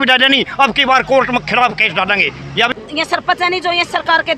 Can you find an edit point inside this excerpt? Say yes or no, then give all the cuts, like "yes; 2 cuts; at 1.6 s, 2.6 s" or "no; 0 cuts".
yes; 1 cut; at 2.7 s